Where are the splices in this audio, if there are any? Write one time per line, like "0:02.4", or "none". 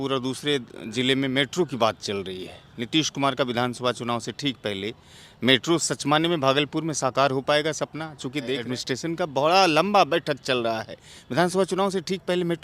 0:08.6